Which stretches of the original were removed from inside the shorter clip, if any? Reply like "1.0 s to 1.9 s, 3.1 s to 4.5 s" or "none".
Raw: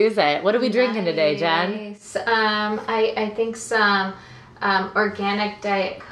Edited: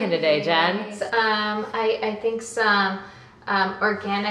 1.9 s to 2.1 s